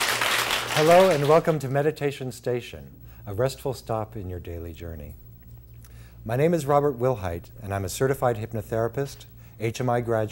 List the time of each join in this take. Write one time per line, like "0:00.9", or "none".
none